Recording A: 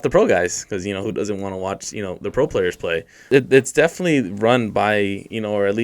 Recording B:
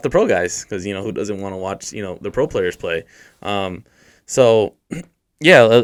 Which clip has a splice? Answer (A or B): A